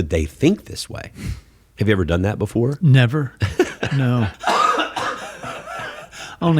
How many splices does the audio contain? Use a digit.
1